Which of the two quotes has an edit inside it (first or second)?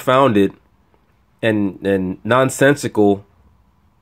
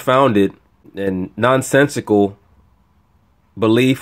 second